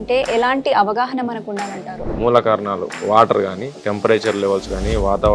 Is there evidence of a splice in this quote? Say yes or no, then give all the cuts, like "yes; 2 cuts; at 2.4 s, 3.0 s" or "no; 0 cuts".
yes; 1 cut; at 2.1 s